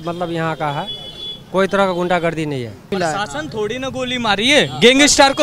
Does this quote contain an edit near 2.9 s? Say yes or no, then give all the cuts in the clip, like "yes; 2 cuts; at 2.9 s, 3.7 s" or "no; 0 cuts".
yes; 1 cut; at 2.9 s